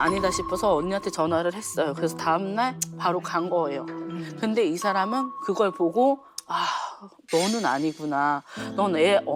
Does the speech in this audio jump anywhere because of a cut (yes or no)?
no